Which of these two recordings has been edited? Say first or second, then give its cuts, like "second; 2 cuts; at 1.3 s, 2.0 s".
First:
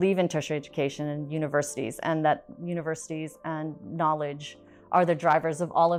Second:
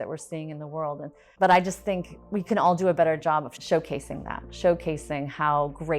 second; 1 cut; at 1.2 s